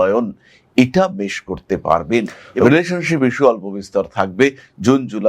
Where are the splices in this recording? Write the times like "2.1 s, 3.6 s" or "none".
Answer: 2.4 s